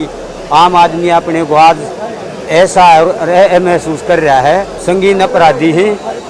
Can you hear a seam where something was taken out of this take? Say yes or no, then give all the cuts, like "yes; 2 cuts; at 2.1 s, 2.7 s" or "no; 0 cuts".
yes; 1 cut; at 4.7 s